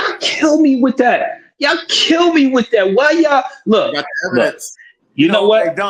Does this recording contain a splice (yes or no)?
no